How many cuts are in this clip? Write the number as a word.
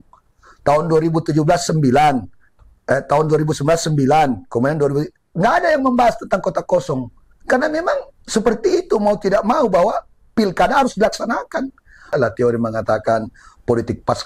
one